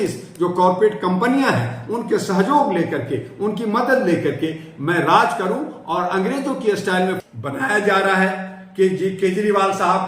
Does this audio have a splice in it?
yes; 1 cut; at 7.2 s

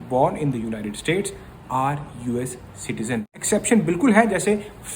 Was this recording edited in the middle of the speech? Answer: yes; 1 cut; at 3.4 s

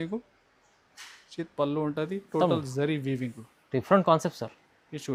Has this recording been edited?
no; 0 cuts

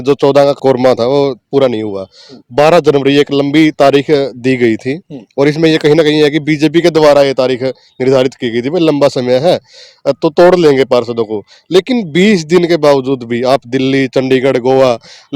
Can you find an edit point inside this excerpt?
no; 0 cuts

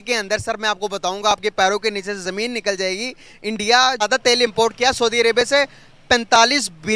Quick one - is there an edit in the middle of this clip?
yes; 1 cut; at 4.0 s

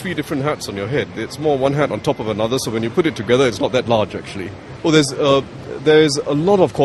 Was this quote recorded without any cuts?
no; 1 cut; at 4.6 s

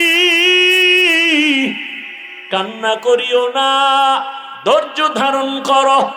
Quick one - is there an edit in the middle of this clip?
no; 0 cuts

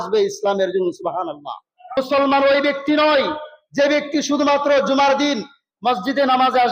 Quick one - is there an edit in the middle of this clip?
yes; 1 cut; at 2.0 s

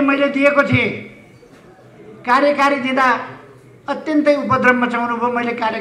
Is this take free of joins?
yes; 0 cuts

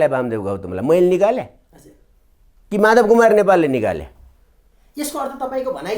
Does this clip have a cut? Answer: no; 0 cuts

